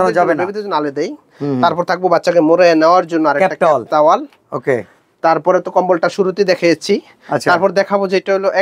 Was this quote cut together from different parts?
no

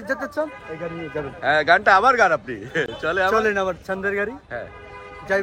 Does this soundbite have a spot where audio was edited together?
no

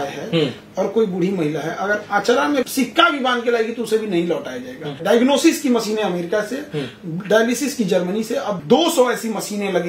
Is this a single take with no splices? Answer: no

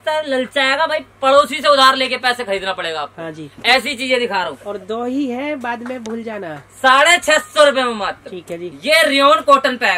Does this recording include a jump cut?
no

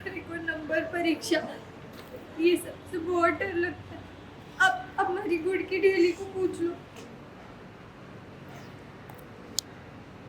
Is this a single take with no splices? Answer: no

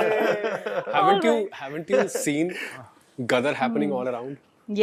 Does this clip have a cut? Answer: no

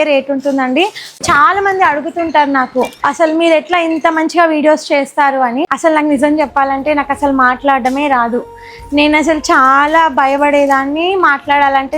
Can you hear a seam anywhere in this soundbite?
yes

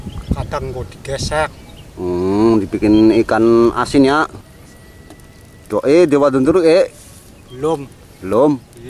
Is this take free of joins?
no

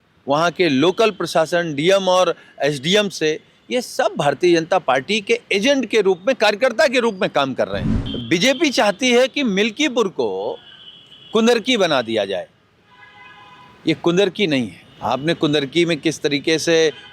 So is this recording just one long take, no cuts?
no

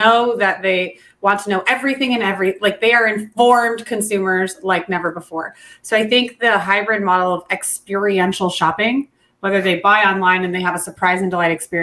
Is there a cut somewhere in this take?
no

